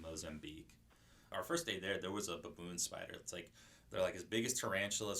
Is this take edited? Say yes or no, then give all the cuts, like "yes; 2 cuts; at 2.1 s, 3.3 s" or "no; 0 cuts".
yes; 1 cut; at 1.2 s